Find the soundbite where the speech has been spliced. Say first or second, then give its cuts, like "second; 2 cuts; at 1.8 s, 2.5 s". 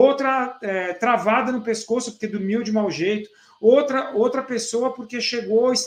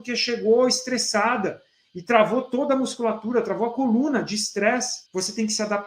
second; 1 cut; at 5.0 s